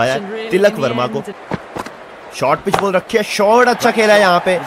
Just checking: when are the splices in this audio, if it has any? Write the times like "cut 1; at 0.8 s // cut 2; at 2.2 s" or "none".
cut 1; at 1.4 s